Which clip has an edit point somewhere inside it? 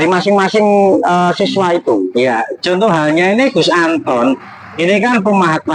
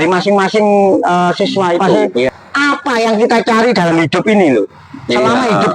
second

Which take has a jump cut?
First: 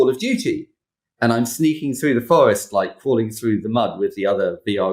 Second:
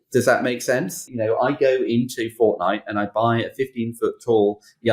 second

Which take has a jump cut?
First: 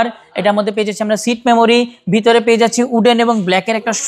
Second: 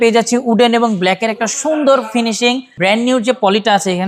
second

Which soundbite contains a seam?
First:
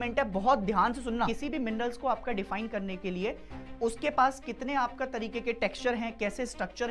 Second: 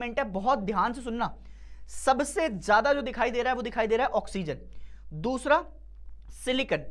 first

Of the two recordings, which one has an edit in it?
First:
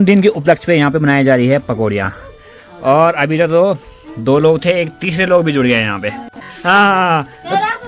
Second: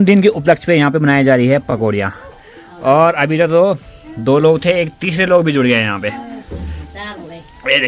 first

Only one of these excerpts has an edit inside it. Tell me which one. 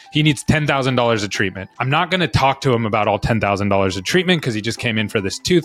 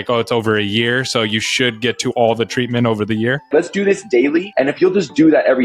second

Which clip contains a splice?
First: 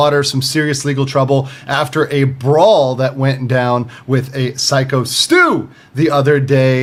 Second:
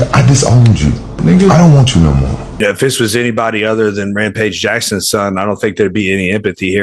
second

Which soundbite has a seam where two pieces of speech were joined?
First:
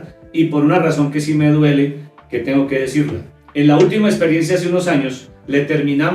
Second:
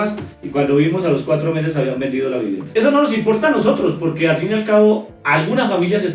second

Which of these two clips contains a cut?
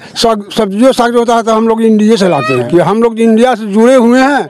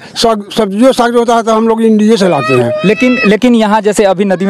first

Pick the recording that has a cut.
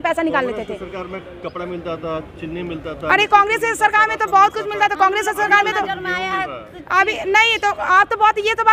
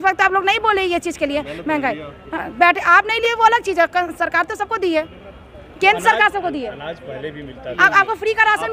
second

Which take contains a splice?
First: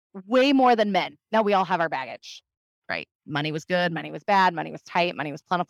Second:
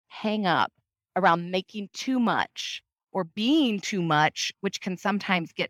first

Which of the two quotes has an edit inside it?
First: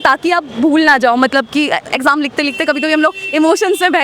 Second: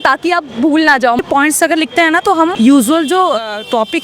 second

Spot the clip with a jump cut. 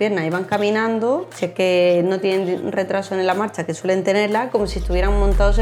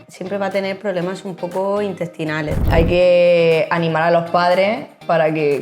second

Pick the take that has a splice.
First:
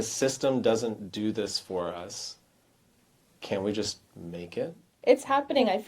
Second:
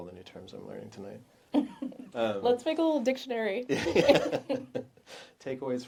first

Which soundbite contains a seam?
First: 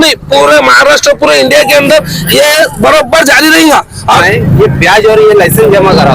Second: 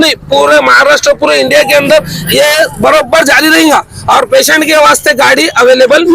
first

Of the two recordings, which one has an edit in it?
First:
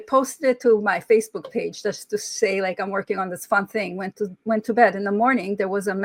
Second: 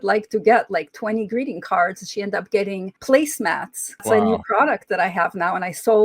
second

